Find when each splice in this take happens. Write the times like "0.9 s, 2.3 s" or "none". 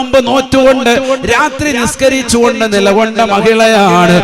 none